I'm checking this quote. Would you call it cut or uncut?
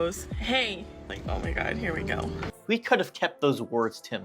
cut